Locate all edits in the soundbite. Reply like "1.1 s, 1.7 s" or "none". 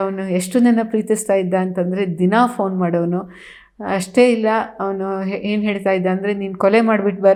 none